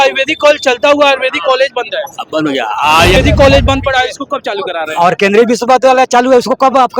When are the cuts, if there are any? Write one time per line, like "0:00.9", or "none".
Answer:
0:03.2